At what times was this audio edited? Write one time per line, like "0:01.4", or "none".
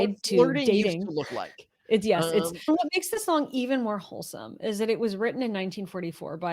0:02.7